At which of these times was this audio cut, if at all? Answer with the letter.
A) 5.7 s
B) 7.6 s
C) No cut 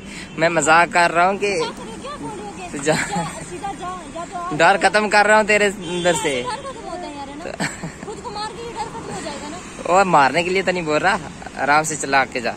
C